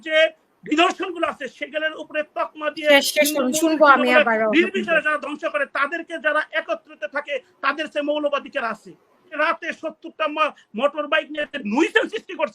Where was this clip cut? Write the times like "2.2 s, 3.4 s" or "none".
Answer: 9.3 s